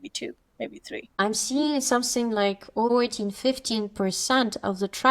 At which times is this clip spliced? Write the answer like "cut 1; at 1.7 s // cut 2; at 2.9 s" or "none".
cut 1; at 1.1 s // cut 2; at 2.9 s